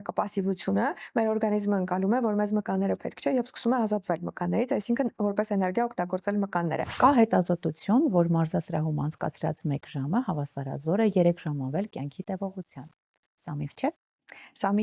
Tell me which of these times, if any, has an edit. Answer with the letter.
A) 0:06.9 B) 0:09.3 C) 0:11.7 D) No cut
A